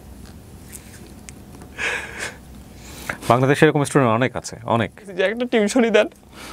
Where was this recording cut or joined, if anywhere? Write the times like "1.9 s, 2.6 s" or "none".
5.1 s